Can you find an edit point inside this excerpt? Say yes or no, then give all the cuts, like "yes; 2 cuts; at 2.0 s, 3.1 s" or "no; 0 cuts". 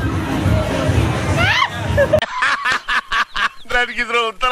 no; 0 cuts